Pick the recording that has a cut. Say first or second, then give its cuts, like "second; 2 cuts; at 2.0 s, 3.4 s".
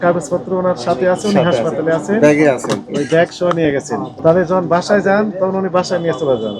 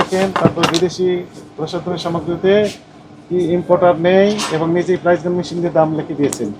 first; 1 cut; at 4.1 s